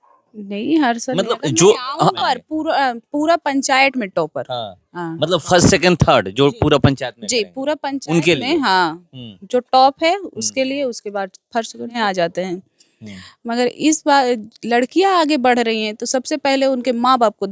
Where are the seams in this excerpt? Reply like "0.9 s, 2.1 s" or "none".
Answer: 2.2 s, 12.0 s